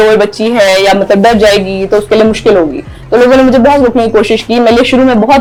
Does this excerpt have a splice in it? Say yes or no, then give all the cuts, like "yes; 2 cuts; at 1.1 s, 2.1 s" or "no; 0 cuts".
no; 0 cuts